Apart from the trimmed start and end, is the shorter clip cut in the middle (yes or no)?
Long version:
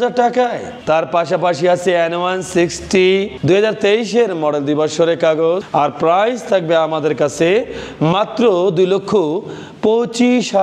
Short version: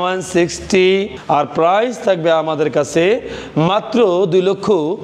yes